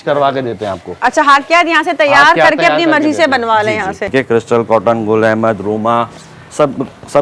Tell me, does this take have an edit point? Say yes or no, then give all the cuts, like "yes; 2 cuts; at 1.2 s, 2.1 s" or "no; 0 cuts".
yes; 1 cut; at 4.1 s